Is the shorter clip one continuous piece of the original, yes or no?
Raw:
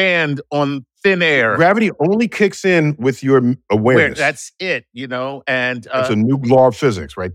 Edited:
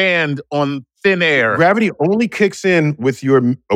yes